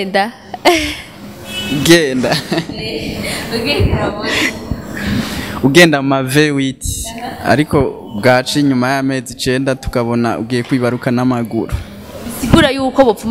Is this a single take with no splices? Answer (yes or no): yes